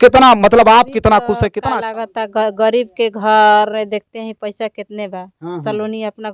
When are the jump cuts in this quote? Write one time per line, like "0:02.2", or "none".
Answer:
0:01.5